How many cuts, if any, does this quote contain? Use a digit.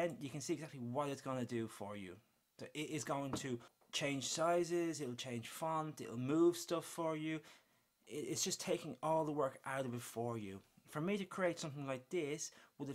1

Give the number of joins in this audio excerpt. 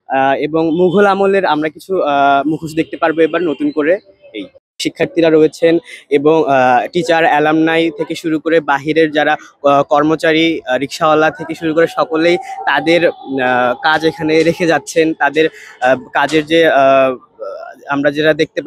0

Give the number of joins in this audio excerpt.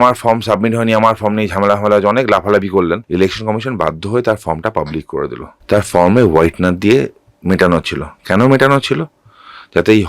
2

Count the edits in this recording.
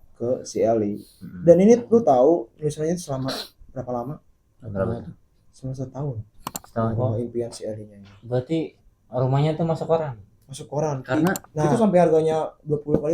2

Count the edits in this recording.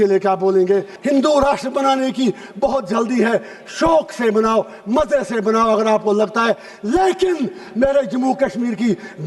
1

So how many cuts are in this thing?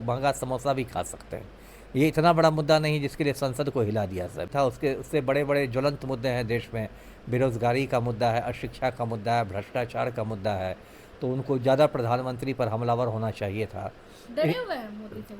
1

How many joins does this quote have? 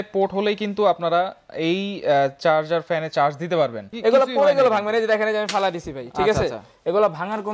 1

